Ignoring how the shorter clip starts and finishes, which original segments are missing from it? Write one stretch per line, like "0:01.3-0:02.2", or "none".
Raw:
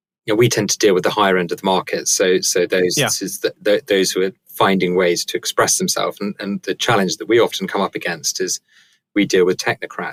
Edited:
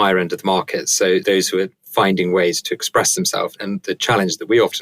0:02.4-0:03.9
0:06.2-0:06.3